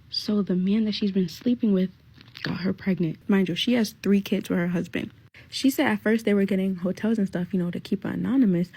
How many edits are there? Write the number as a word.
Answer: one